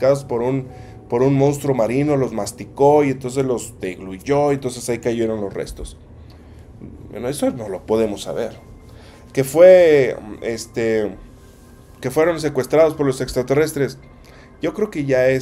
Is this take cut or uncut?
uncut